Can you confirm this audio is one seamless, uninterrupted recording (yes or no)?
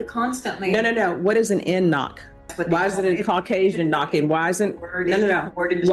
no